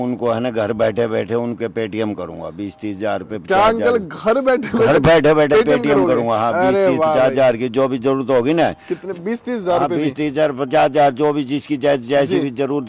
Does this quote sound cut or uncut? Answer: uncut